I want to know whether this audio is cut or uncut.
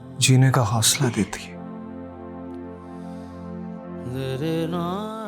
uncut